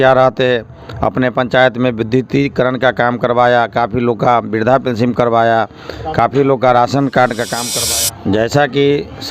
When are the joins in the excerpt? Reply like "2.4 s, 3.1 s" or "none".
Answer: 7.7 s